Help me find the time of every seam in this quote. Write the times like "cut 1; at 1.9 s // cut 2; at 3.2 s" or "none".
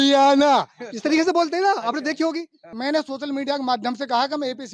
cut 1; at 2.6 s